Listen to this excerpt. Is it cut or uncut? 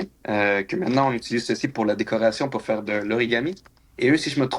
cut